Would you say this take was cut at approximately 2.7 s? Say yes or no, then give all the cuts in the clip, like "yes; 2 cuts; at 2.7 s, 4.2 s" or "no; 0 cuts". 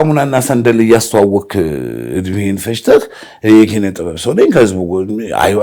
no; 0 cuts